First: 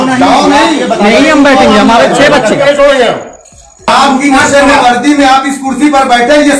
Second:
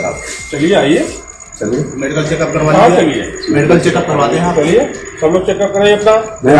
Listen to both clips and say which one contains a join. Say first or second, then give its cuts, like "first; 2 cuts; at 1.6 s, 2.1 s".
first; 1 cut; at 3.9 s